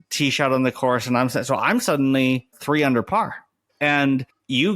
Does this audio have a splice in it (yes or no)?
yes